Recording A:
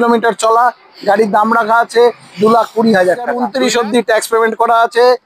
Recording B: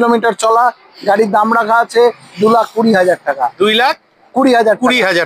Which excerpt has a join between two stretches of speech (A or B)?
A